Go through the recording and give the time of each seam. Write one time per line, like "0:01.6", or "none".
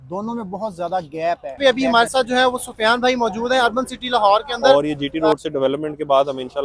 0:01.6
0:04.5